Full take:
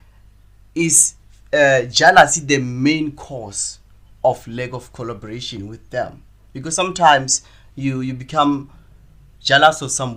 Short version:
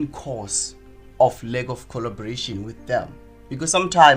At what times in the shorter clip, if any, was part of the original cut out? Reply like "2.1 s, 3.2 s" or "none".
none